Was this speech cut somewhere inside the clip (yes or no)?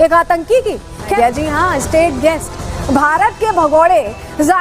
yes